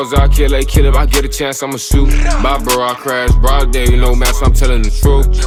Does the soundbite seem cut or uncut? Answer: uncut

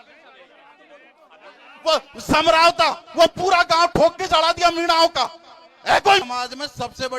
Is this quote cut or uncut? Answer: cut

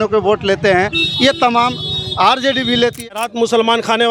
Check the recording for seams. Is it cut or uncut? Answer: cut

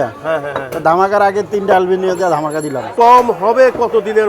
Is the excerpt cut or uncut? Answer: cut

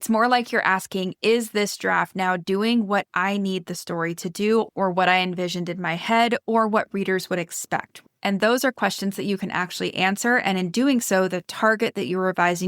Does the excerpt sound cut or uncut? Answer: cut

